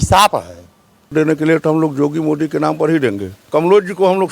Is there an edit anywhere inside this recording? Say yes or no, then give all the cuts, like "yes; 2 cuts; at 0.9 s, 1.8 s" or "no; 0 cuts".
yes; 2 cuts; at 1.1 s, 3.4 s